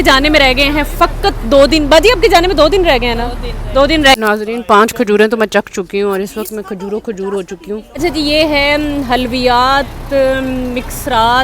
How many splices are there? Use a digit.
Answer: 2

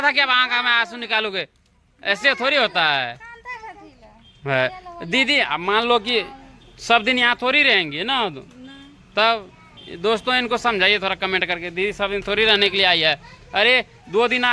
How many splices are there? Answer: 0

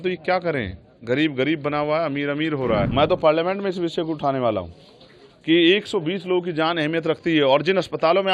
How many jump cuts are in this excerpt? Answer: 1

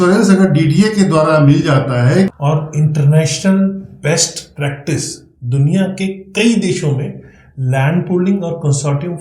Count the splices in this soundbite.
1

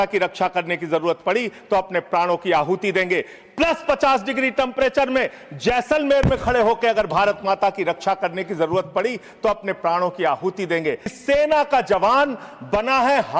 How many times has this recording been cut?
1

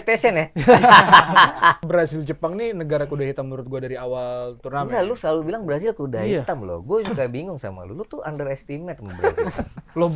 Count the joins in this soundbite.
1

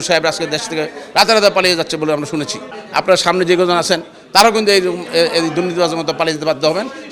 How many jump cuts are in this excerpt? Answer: 0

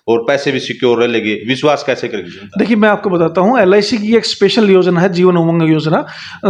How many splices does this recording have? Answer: 0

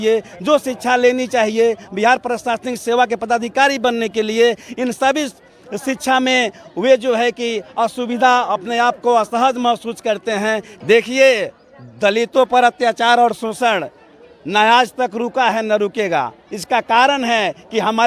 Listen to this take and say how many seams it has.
1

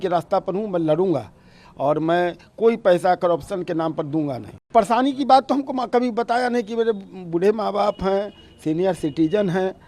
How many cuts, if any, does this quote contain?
1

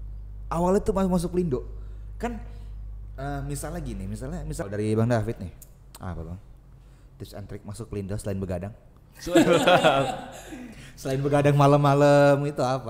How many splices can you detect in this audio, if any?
1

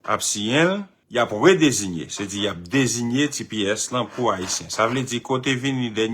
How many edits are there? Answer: 1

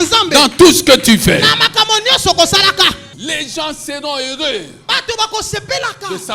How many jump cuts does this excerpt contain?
1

